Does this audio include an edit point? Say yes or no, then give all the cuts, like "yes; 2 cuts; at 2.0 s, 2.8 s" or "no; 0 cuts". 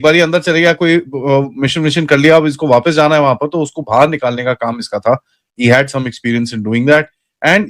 no; 0 cuts